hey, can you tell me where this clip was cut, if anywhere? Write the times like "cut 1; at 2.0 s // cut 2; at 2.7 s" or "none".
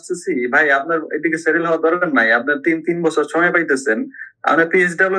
none